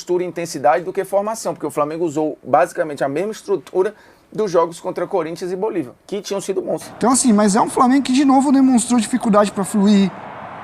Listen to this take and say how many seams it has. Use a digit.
1